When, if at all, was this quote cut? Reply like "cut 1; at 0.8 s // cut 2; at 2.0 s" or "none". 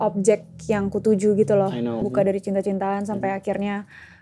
cut 1; at 2.0 s